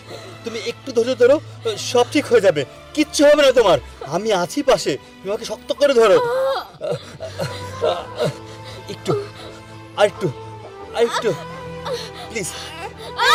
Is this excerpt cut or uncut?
uncut